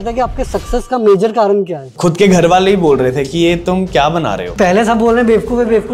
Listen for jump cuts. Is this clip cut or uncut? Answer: cut